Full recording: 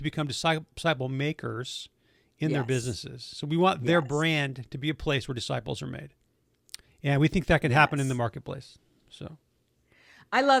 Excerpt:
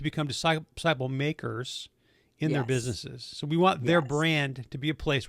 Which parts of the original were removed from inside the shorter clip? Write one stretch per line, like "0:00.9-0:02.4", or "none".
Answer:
none